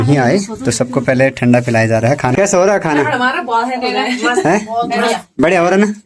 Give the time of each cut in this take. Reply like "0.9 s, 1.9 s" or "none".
2.3 s

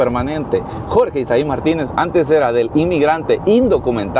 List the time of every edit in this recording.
none

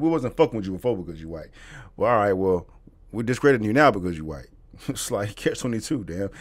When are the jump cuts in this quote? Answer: none

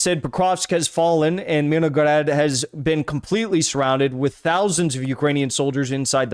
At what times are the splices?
none

